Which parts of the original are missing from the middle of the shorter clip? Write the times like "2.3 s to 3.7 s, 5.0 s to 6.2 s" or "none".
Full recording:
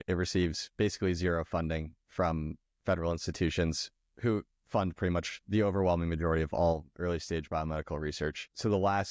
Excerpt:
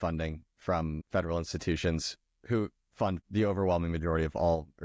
2.5 s to 2.7 s, 4.9 s to 5.4 s

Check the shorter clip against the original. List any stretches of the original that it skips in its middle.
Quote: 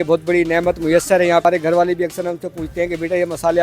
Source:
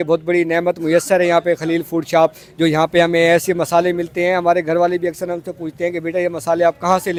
1.4 s to 4.5 s

